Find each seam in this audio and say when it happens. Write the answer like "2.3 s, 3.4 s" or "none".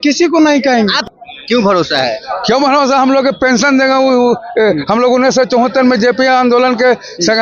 1.0 s